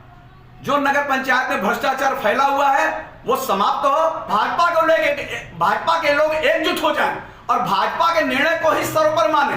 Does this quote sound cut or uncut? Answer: cut